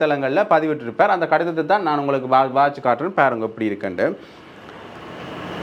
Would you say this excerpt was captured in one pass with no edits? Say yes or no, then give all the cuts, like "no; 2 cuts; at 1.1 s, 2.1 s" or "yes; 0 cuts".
yes; 0 cuts